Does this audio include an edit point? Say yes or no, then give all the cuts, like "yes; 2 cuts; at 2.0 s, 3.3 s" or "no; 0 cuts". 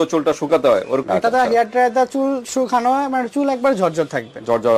yes; 1 cut; at 1.0 s